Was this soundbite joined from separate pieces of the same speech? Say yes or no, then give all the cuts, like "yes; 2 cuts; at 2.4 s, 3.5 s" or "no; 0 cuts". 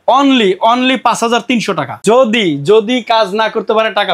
yes; 1 cut; at 2.0 s